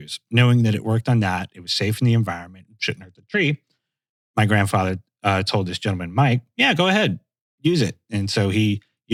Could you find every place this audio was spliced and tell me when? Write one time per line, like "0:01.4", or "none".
none